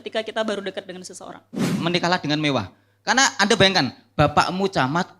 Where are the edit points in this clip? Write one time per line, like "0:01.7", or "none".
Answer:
0:01.7